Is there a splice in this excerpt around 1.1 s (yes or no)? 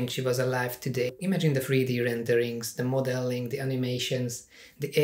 yes